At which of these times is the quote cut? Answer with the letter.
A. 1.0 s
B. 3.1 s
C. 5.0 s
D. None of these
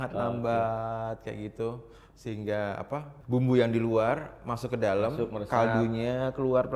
B